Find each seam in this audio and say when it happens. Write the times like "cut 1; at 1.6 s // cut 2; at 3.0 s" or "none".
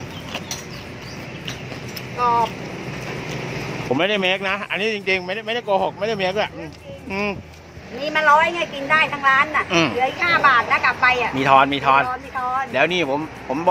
cut 1; at 7.7 s